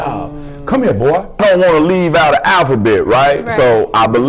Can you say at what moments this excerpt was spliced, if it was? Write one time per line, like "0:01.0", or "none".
0:01.4